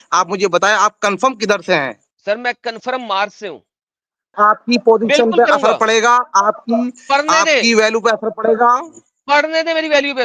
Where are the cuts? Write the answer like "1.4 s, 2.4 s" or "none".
2.1 s, 4.3 s